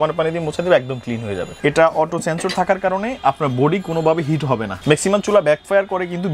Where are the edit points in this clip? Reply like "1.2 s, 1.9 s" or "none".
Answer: 1.4 s, 4.7 s